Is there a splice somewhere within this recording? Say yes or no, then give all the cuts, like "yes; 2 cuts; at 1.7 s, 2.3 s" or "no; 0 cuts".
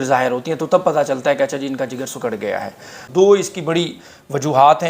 yes; 1 cut; at 3.0 s